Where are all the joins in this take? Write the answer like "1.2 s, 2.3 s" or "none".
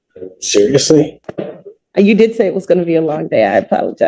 1.8 s

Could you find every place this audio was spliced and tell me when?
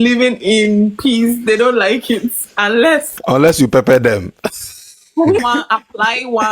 3.1 s, 5.4 s

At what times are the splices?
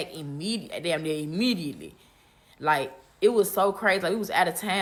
none

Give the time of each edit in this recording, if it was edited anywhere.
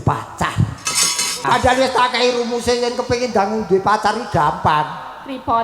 1.4 s

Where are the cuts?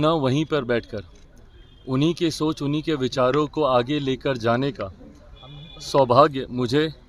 none

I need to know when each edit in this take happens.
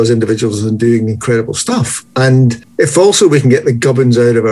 2.6 s

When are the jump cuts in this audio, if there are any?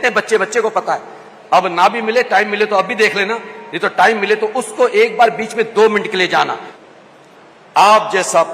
6.7 s

